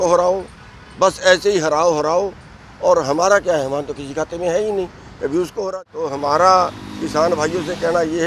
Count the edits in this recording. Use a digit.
1